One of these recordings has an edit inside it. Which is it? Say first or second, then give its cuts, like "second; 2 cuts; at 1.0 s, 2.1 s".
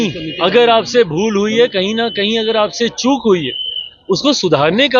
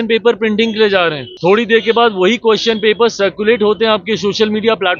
second; 1 cut; at 1.2 s